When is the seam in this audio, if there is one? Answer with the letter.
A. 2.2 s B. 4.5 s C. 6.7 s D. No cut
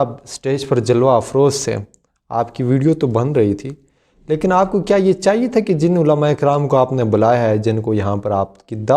D